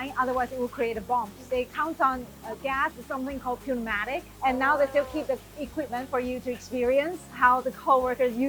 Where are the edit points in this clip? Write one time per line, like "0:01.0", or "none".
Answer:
0:01.4
0:02.4
0:04.3
0:07.3